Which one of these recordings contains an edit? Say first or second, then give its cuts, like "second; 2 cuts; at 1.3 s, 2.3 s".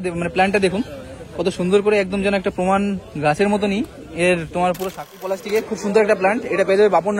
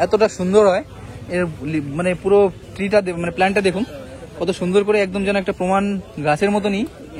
first; 1 cut; at 5.3 s